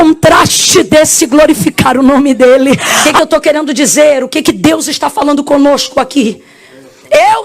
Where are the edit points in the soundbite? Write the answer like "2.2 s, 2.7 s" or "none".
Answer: 3.0 s

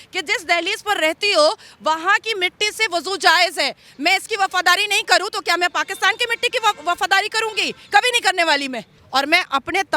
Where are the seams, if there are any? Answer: 8.9 s

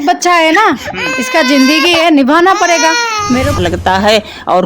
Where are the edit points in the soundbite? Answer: 3.6 s

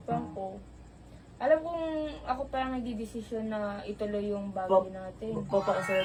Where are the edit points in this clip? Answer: none

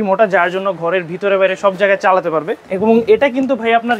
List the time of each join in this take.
2.6 s

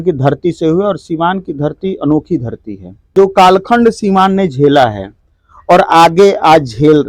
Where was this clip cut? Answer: 3.0 s

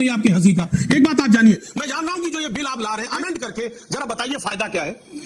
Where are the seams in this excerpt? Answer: none

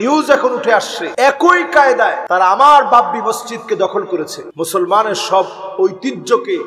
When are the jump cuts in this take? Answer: 1.0 s, 2.2 s, 4.4 s

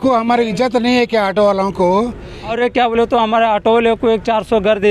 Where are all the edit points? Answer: 2.5 s

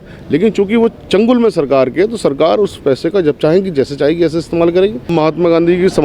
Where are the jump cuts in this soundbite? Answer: 5.1 s

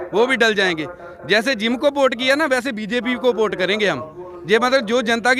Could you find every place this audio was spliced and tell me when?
none

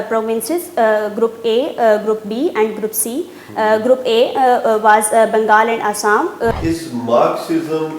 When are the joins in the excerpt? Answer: 6.5 s

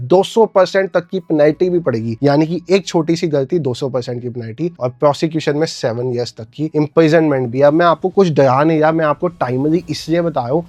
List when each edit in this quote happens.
none

